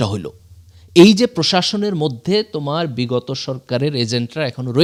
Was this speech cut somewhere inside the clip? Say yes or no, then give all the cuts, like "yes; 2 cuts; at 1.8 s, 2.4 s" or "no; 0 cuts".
no; 0 cuts